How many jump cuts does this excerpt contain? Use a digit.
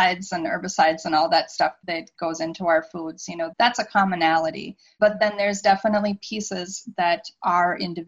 1